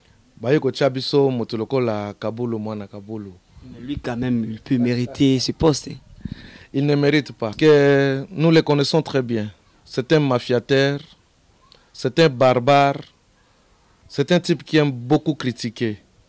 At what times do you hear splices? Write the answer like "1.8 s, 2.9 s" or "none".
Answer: 7.4 s